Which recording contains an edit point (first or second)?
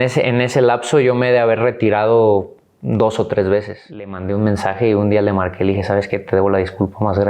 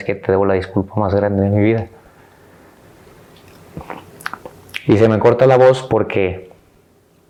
first